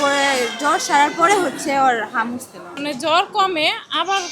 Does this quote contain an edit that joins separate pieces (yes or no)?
yes